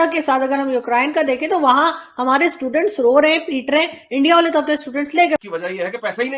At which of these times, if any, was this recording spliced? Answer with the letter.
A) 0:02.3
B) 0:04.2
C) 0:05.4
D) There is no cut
C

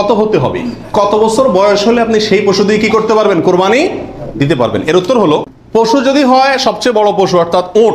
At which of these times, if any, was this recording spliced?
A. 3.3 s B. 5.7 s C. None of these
C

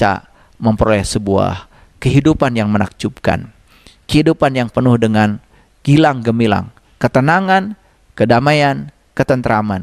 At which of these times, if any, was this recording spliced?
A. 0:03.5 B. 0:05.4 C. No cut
C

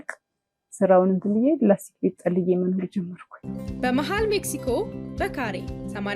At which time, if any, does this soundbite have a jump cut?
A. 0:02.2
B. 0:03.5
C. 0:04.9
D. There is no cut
B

